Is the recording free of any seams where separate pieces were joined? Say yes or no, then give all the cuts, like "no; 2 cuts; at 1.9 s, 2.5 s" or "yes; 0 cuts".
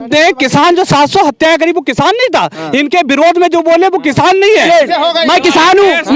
no; 1 cut; at 4.6 s